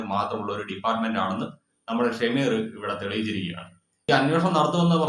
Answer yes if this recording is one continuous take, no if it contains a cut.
no